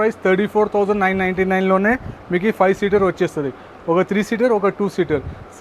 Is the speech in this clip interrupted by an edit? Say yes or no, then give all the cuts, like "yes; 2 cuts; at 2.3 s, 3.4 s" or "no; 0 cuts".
no; 0 cuts